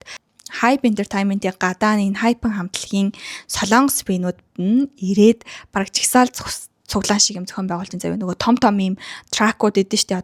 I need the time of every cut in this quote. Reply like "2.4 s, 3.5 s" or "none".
none